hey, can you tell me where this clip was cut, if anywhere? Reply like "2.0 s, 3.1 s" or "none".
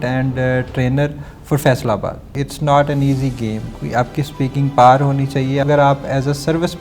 2.4 s, 3.8 s, 5.6 s